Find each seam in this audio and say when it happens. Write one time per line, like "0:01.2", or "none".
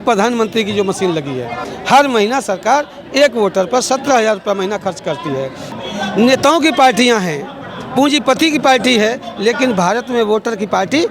0:01.6
0:05.7